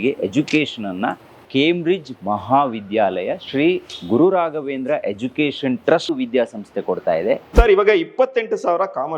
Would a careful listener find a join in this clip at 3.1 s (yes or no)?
no